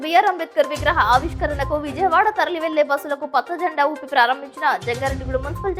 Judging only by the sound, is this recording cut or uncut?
uncut